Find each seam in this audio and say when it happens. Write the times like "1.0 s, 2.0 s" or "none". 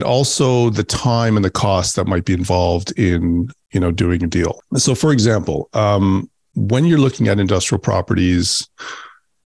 4.6 s